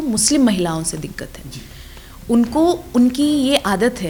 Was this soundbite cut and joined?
no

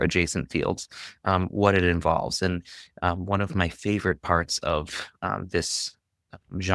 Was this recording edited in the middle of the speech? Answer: no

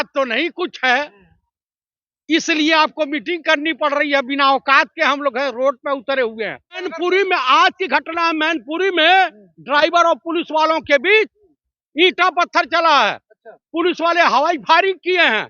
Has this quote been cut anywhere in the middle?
yes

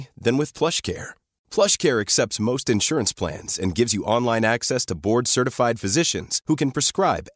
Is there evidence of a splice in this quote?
no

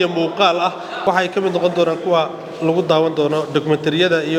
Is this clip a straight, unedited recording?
yes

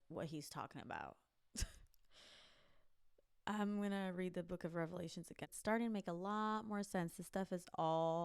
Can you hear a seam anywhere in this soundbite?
yes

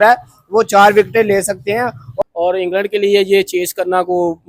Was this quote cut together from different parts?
yes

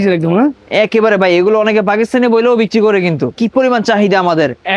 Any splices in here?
yes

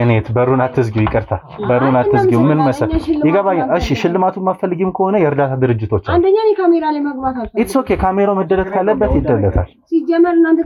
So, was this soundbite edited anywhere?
no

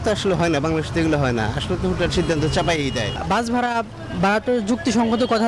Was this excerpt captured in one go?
no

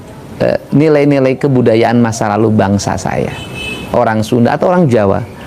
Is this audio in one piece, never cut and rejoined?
yes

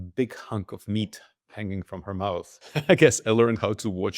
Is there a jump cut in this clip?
yes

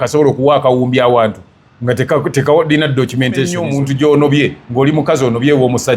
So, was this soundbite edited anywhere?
yes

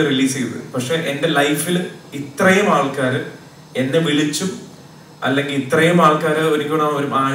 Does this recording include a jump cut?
no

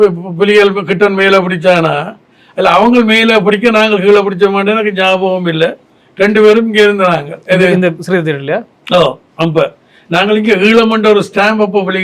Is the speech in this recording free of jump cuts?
yes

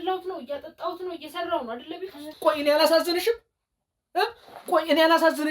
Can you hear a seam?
yes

